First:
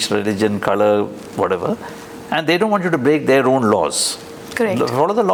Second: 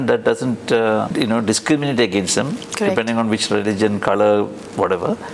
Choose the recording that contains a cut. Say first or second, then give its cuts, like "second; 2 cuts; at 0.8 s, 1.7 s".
second; 1 cut; at 1.1 s